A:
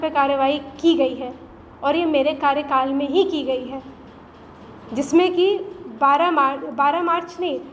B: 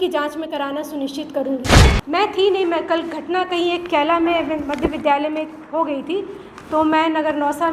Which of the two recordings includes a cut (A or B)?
B